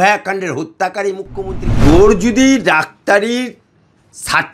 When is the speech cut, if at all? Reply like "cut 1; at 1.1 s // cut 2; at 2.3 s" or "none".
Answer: cut 1; at 1.7 s